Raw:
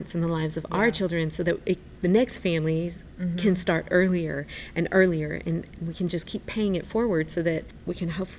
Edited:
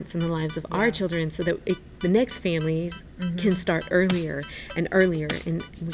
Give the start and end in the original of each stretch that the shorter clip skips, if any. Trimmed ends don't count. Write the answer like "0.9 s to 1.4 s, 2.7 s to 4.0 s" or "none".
none